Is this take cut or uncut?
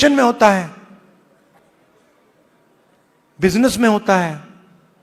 cut